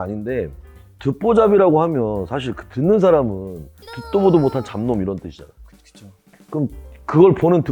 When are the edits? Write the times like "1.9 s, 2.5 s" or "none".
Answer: none